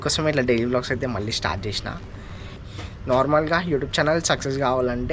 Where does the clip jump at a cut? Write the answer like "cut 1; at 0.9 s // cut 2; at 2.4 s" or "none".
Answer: cut 1; at 2.6 s